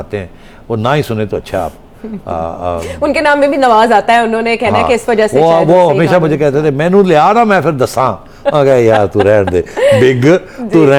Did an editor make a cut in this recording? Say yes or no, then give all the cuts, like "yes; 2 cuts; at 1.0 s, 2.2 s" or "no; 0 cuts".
no; 0 cuts